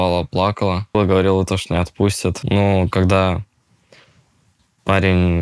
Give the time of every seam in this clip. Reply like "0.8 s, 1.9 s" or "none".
0.9 s, 2.4 s